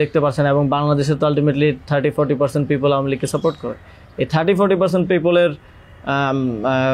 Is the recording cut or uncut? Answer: uncut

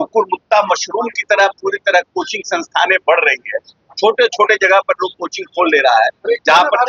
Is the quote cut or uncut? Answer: uncut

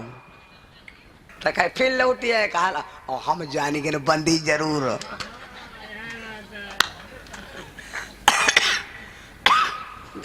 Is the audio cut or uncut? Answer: cut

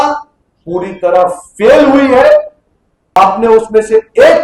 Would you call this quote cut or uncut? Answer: cut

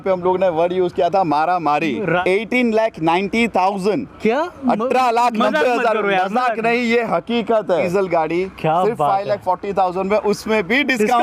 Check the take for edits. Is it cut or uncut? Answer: cut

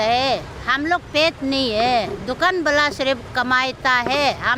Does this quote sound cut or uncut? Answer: uncut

